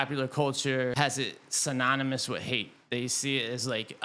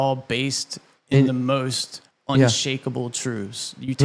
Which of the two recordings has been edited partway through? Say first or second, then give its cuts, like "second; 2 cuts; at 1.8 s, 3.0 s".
first; 1 cut; at 0.9 s